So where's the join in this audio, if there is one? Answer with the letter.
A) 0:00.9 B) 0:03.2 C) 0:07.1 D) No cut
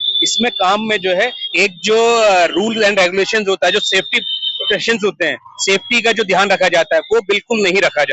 D